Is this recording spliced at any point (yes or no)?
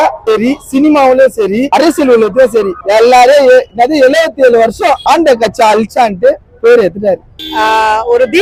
no